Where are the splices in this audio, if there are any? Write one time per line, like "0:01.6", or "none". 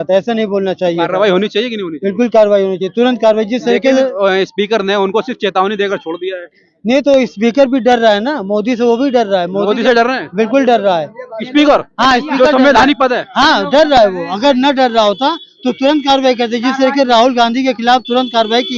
none